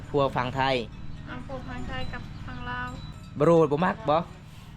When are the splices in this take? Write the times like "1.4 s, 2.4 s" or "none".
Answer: 3.1 s